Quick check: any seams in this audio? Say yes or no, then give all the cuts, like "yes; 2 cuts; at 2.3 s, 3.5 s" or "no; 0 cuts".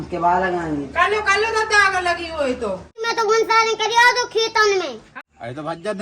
yes; 2 cuts; at 3.1 s, 5.0 s